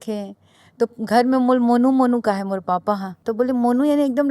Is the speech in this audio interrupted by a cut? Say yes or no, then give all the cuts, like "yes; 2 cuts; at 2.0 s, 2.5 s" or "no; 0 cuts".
yes; 1 cut; at 3.2 s